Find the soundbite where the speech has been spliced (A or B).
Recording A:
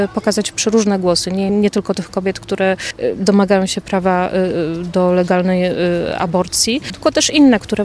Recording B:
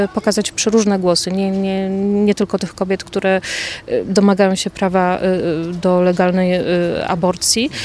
A